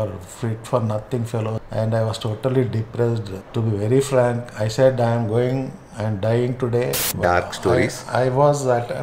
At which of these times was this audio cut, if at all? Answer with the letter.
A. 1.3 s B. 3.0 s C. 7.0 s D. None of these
C